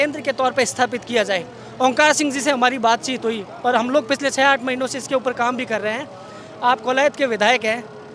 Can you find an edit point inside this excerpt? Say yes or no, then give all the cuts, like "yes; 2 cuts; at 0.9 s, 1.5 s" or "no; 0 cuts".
no; 0 cuts